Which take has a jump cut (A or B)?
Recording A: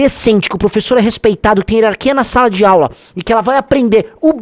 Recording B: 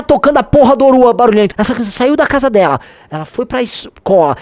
B